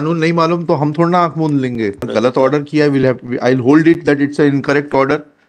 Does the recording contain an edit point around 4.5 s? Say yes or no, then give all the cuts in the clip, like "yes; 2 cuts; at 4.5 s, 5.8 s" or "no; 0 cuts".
no; 1 cut; at 2.1 s